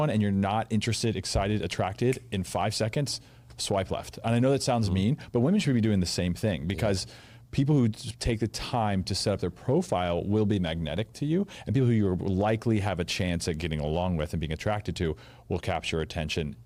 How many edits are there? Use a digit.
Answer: 0